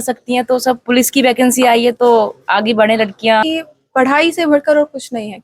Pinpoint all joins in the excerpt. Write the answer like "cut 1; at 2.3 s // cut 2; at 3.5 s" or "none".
cut 1; at 3.4 s